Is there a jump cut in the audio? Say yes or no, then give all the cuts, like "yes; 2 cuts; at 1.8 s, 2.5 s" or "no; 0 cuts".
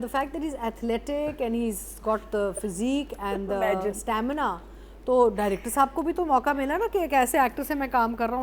no; 0 cuts